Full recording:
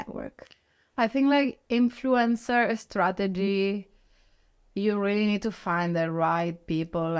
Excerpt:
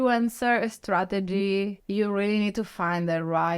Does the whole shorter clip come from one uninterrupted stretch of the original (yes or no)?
no